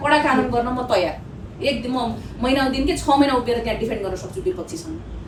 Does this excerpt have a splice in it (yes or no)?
no